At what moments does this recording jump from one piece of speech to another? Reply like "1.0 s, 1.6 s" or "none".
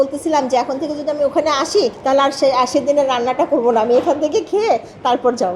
2.0 s